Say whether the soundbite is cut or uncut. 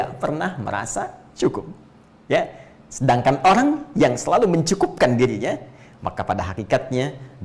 uncut